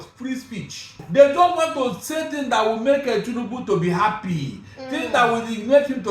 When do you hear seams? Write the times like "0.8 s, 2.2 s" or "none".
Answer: 1.0 s